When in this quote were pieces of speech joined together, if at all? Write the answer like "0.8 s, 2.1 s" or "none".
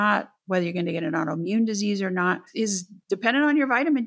2.5 s